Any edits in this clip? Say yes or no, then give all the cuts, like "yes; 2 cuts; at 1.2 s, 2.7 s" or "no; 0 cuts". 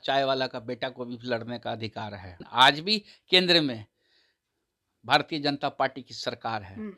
yes; 1 cut; at 2.3 s